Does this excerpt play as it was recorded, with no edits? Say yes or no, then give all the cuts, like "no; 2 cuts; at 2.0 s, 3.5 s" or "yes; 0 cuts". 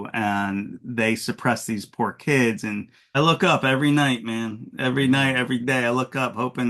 no; 1 cut; at 3.2 s